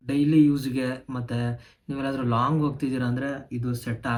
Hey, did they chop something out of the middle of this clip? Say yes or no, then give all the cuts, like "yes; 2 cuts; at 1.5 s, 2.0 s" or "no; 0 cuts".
no; 0 cuts